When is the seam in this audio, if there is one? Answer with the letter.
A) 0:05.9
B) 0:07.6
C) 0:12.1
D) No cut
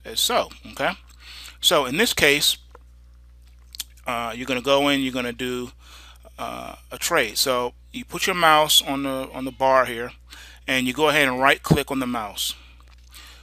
C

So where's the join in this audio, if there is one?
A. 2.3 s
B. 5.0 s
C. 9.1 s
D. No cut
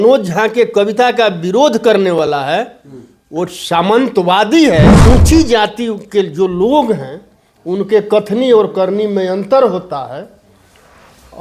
B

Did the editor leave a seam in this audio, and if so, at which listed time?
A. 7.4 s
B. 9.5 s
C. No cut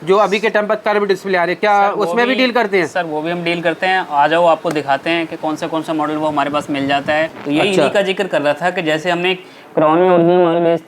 A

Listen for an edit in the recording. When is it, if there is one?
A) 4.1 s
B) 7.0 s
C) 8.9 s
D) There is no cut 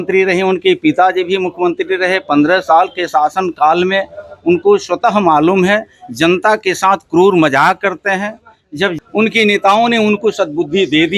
C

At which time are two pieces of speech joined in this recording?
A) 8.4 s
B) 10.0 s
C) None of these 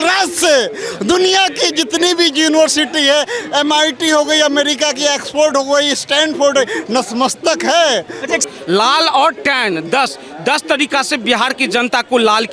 A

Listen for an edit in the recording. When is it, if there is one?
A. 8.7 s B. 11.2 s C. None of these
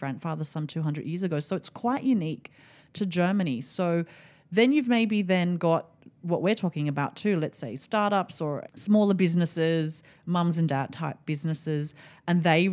A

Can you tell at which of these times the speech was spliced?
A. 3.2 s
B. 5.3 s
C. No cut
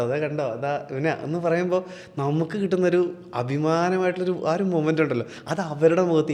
C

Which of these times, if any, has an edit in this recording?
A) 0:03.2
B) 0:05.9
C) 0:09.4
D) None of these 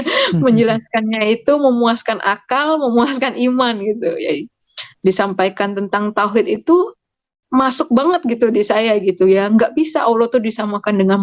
C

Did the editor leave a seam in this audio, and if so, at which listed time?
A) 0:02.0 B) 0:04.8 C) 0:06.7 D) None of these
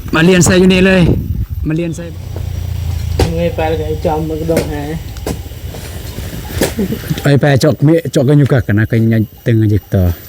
A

